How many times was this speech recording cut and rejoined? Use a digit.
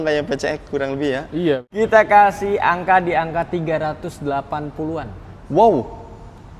1